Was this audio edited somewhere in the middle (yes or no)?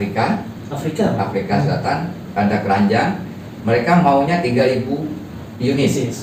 no